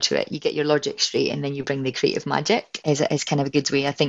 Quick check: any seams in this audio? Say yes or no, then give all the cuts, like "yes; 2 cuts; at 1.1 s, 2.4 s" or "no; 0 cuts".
yes; 1 cut; at 2.7 s